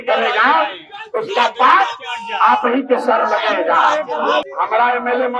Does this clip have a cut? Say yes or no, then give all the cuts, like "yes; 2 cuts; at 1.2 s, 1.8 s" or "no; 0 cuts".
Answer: yes; 1 cut; at 4.4 s